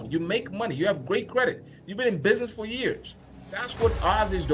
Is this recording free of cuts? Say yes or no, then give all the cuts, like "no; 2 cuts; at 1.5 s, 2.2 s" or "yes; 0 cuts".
no; 1 cut; at 3.1 s